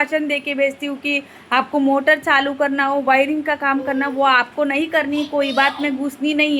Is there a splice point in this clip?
no; 0 cuts

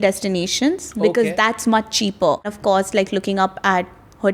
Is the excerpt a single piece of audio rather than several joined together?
no; 1 cut; at 2.5 s

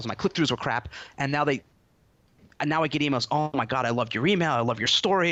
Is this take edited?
no; 0 cuts

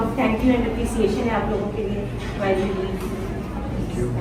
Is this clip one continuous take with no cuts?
yes; 0 cuts

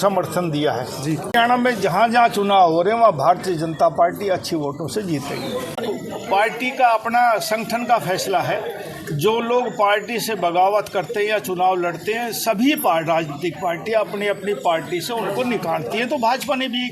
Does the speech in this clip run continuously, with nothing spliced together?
no; 2 cuts; at 1.3 s, 5.8 s

